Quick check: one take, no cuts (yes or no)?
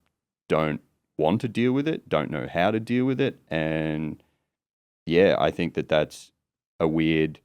yes